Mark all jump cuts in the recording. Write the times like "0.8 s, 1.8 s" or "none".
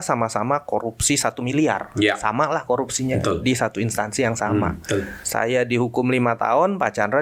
5.2 s